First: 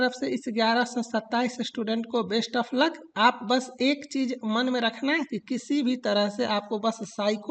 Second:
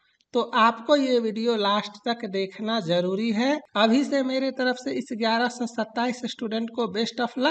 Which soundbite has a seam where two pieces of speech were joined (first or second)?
second